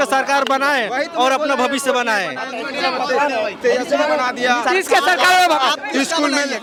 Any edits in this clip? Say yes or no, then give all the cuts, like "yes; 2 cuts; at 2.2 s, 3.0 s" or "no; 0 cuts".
no; 0 cuts